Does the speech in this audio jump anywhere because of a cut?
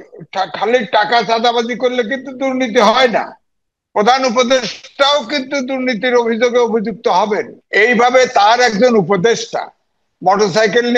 yes; 1 cut; at 7.6 s

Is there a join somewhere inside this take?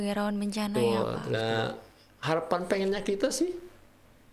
yes; 1 cut; at 1.3 s

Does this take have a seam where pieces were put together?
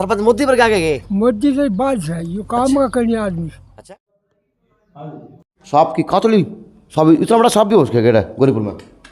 yes; 1 cut; at 3.9 s

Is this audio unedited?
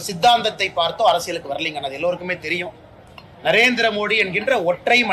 yes; 0 cuts

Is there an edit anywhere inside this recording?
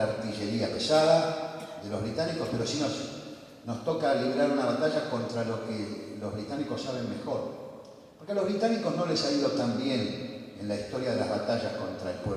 yes; 1 cut; at 5.2 s

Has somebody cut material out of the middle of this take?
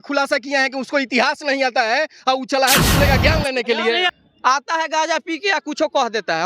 yes; 1 cut; at 4.2 s

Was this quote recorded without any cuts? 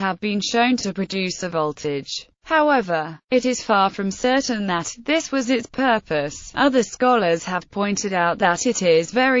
yes; 0 cuts

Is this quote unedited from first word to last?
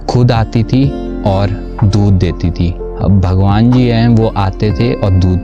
yes; 0 cuts

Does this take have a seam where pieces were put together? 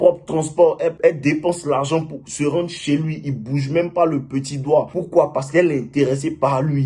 yes; 2 cuts; at 1.0 s, 5.0 s

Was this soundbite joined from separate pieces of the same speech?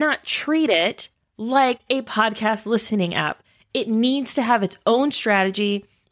no; 0 cuts

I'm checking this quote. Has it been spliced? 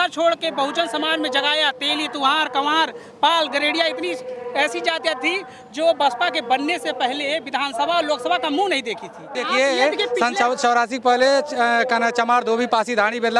yes; 1 cut; at 9.4 s

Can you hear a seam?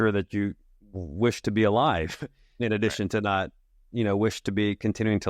yes; 1 cut; at 2.6 s

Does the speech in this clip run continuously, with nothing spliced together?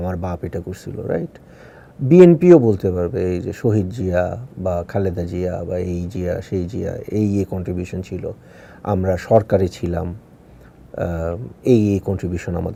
yes; 0 cuts

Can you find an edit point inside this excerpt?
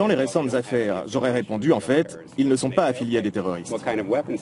yes; 1 cut; at 2.1 s

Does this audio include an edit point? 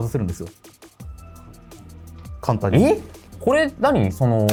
no; 0 cuts

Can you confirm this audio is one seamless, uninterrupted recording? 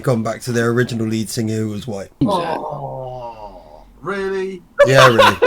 no; 1 cut; at 2.2 s

